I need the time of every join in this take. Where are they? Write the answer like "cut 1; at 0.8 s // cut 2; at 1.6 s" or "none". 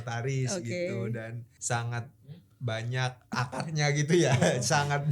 cut 1; at 1.5 s // cut 2; at 3.3 s